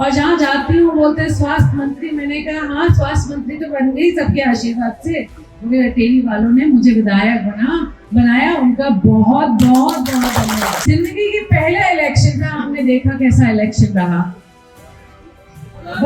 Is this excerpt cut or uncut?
cut